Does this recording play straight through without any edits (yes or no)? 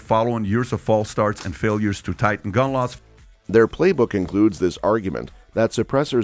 yes